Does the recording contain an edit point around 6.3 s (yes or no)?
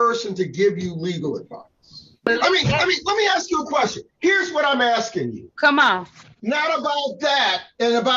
yes